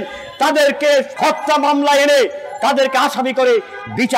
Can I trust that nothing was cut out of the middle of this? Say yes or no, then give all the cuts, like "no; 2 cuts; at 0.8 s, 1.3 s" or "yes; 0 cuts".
yes; 0 cuts